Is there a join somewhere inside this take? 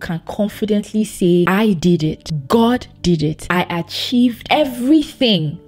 no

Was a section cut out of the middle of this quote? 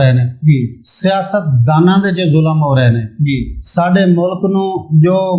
no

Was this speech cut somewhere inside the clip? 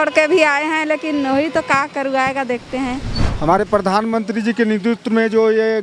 yes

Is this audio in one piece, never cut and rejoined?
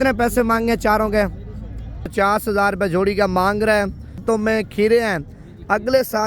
no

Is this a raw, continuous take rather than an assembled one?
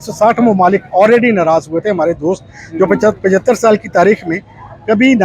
yes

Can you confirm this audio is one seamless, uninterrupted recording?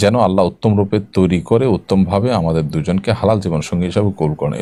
yes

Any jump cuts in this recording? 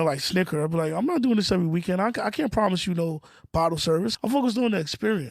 yes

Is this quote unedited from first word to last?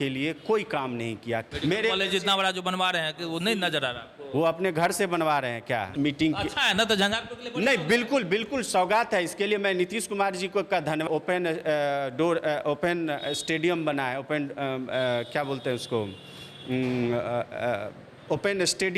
no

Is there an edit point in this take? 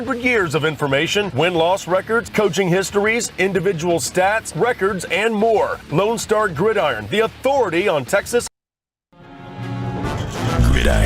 yes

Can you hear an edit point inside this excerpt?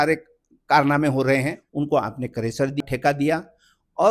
yes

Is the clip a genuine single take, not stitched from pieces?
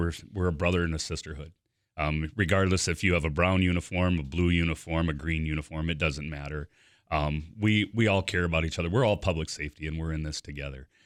yes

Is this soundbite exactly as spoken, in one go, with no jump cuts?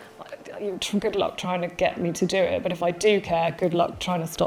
yes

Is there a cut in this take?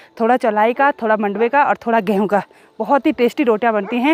no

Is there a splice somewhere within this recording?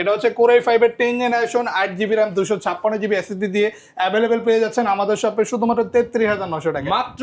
no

